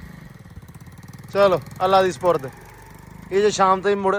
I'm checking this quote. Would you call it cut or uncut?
uncut